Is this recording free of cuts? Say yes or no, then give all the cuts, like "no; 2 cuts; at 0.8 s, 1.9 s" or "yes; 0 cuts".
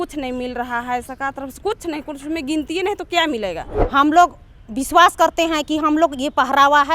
no; 1 cut; at 3.8 s